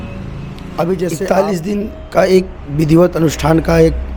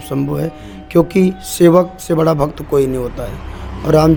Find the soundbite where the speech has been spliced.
first; 1 cut; at 1.2 s

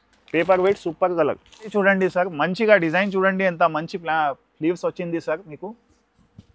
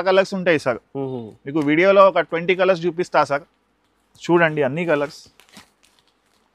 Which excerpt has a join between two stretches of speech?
first; 1 cut; at 1.7 s

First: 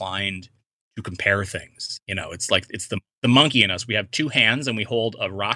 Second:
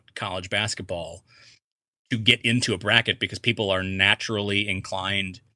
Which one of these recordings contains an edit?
first; 1 cut; at 2.6 s

